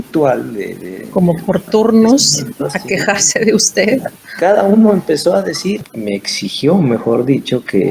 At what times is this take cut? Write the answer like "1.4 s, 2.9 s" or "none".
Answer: 5.8 s